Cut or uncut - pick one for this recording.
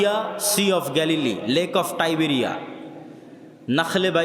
uncut